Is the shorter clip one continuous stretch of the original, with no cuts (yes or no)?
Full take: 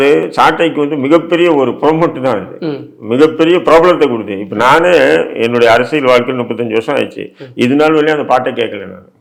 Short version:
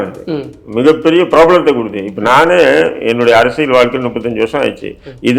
yes